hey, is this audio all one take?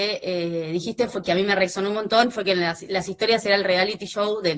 yes; 0 cuts

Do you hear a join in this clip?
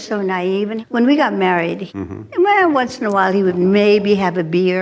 yes; 1 cut; at 1.8 s

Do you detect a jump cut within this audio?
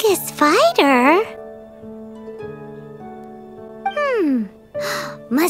no; 0 cuts

